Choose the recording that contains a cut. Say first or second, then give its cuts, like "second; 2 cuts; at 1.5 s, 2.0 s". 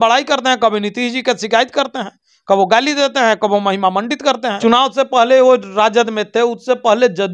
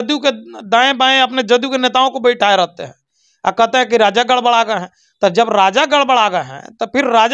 first; 1 cut; at 4.6 s